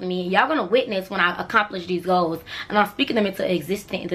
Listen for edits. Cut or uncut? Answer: uncut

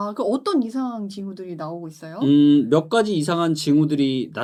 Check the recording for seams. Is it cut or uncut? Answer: uncut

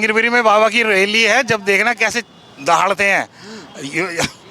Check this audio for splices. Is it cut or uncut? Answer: uncut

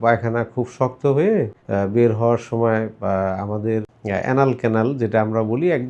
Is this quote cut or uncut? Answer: cut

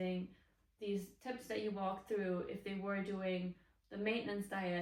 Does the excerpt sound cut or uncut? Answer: uncut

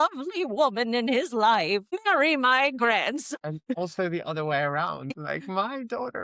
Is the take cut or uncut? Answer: cut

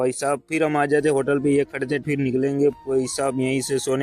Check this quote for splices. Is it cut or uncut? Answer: cut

